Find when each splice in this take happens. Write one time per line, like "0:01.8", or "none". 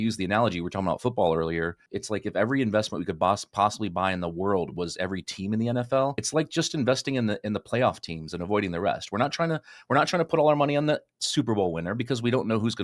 0:01.9
0:06.2